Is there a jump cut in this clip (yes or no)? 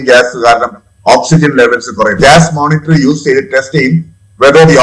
yes